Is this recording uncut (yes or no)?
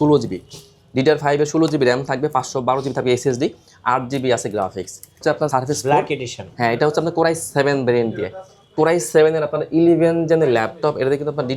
no